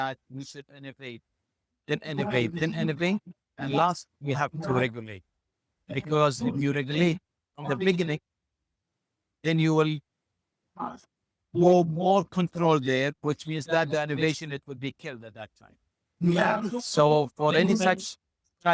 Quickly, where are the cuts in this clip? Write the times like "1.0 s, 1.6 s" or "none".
none